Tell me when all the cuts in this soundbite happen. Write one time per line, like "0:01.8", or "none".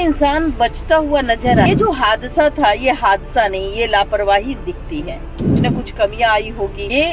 0:01.7
0:05.5